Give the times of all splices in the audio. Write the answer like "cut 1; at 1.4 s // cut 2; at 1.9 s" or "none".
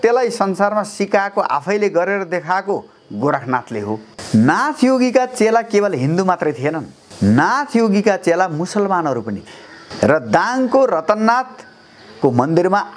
cut 1; at 4.1 s